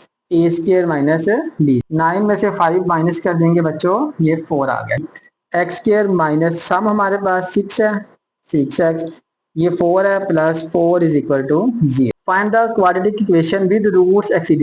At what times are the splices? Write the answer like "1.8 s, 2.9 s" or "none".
1.9 s, 5.0 s, 12.2 s